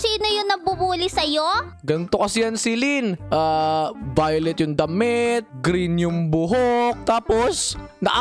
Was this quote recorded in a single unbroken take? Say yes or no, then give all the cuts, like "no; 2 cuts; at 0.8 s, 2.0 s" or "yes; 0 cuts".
yes; 0 cuts